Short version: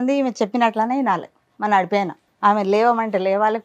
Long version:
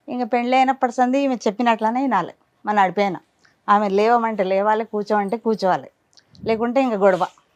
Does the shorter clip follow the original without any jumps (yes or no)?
no